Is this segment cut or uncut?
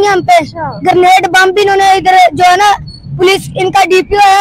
uncut